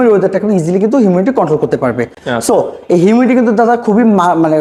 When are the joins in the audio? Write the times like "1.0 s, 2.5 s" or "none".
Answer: none

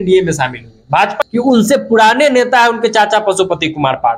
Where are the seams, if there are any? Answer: 1.2 s

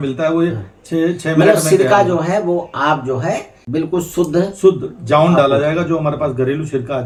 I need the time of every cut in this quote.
none

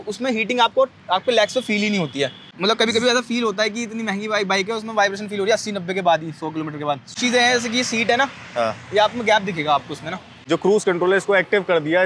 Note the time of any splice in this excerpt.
2.5 s, 7.1 s, 10.3 s

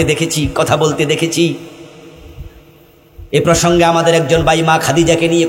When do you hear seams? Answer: none

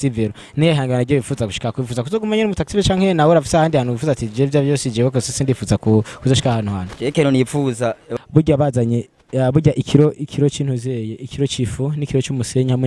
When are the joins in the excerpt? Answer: 8.1 s

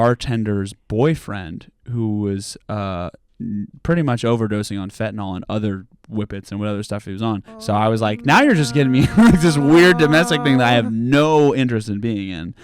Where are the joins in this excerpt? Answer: 7.5 s

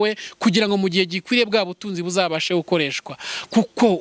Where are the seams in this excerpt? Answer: none

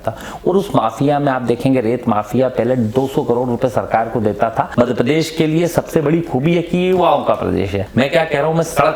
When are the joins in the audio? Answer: 4.7 s, 7.8 s

